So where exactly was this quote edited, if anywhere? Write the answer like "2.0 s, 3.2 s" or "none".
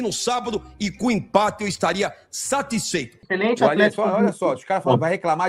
3.2 s